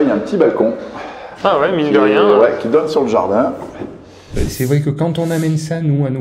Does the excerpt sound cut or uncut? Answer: cut